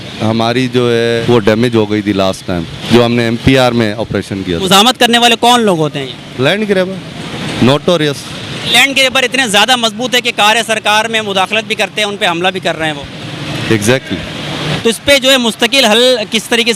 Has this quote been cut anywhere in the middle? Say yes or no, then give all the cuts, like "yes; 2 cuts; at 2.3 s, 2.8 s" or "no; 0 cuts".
yes; 5 cuts; at 1.2 s, 2.7 s, 4.6 s, 8.7 s, 14.7 s